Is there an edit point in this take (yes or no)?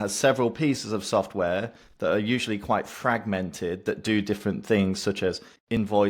no